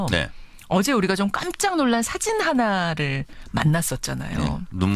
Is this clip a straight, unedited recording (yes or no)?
no